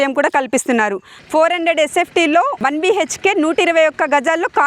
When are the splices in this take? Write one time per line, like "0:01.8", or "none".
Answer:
0:01.1
0:02.5